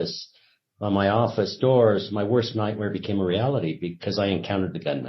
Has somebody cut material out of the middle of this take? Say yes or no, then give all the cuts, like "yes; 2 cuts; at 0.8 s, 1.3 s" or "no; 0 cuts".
no; 0 cuts